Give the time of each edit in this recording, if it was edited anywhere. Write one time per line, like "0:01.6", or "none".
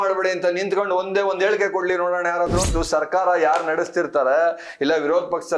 0:02.7

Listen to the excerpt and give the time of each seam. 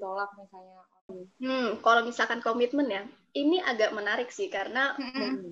0:01.2

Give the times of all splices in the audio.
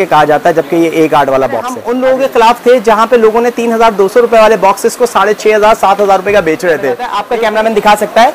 0:01.8
0:07.2

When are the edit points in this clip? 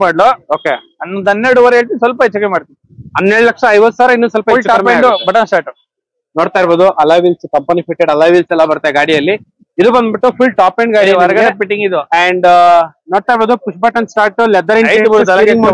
none

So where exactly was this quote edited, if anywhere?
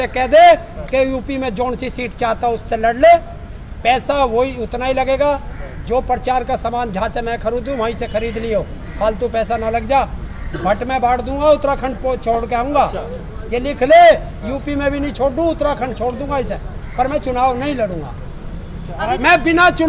none

